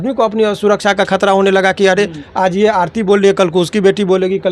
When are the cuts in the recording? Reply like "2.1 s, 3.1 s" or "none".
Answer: none